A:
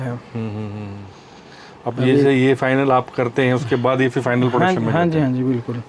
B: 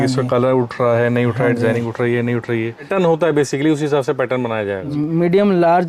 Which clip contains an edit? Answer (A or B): B